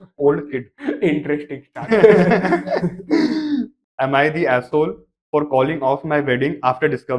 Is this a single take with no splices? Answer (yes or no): no